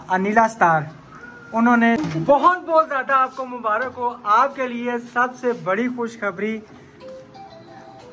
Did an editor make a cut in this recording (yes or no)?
yes